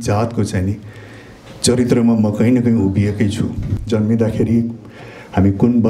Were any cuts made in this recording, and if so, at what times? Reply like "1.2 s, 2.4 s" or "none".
3.7 s